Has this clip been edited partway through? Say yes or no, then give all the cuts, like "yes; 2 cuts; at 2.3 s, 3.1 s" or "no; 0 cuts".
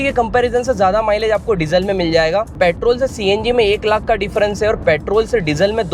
yes; 1 cut; at 2.5 s